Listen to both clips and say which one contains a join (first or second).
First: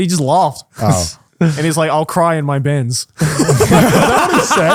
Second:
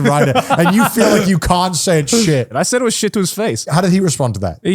second